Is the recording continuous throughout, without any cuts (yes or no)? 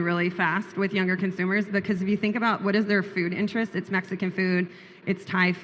yes